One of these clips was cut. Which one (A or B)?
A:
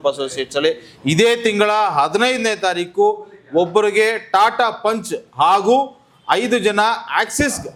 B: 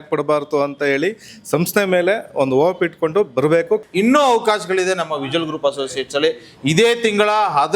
B